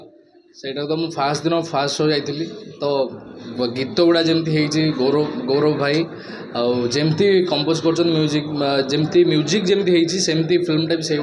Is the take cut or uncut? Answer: uncut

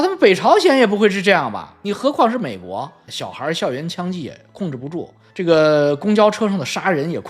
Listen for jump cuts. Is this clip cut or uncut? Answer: cut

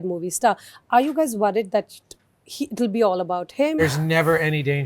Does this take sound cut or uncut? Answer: cut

